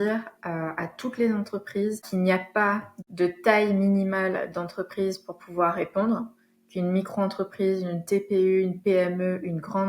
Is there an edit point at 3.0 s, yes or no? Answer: yes